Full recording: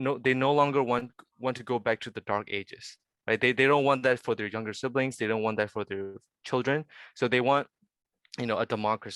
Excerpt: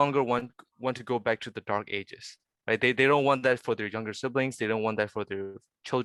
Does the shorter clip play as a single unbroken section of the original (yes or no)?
yes